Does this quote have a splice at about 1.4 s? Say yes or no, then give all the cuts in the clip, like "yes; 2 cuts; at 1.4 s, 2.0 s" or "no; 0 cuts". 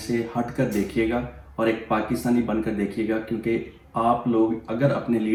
no; 0 cuts